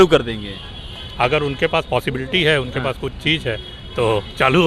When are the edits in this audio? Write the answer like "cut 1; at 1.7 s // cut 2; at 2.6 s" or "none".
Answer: none